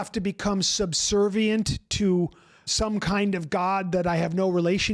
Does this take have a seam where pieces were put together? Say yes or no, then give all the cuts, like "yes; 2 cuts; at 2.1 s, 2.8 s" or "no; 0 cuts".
yes; 1 cut; at 2.6 s